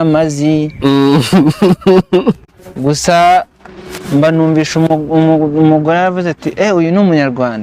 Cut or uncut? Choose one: cut